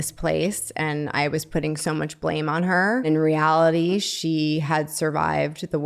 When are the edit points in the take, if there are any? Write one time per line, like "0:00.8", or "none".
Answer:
0:03.0